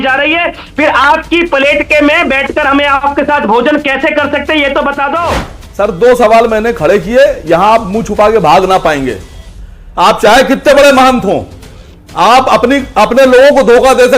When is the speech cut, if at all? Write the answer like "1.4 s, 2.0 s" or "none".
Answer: 5.6 s